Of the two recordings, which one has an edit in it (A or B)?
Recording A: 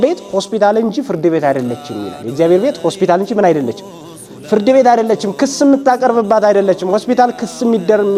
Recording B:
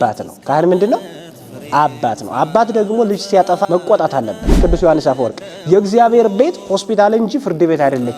B